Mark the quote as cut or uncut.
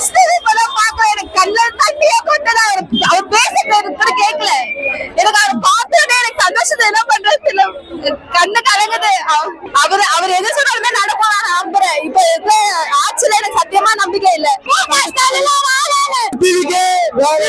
uncut